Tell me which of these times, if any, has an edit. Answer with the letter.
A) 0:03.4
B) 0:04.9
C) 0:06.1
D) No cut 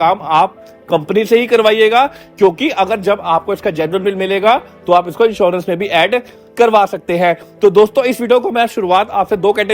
D